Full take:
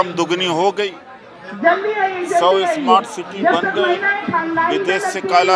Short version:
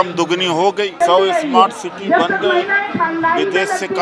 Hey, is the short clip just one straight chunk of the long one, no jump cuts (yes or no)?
no